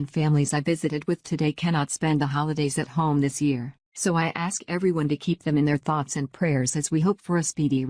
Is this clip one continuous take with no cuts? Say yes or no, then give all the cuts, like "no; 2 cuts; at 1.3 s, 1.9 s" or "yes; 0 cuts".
yes; 0 cuts